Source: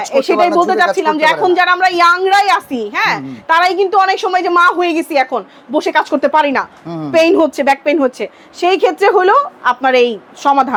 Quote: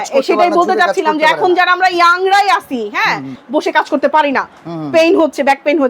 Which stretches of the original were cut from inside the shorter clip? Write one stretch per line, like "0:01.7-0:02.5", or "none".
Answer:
0:03.3-0:05.5